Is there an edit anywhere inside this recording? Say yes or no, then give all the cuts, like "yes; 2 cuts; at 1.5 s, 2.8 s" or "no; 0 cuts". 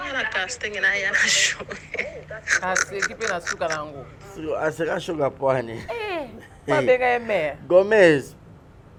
no; 0 cuts